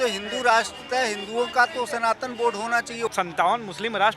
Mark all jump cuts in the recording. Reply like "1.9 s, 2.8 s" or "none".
3.1 s